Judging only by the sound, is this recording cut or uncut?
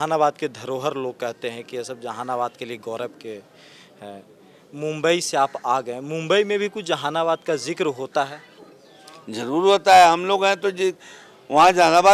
uncut